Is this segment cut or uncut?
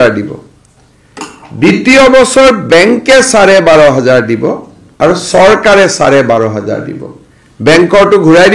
uncut